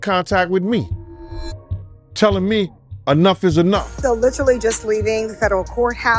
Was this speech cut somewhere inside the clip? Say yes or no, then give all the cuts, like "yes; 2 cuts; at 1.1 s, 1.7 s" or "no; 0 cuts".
yes; 1 cut; at 3.9 s